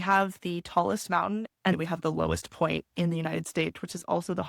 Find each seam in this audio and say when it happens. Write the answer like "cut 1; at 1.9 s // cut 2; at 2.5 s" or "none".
cut 1; at 1.7 s